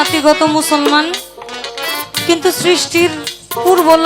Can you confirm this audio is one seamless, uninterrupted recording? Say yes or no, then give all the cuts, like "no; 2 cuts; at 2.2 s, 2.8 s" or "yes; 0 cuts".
yes; 0 cuts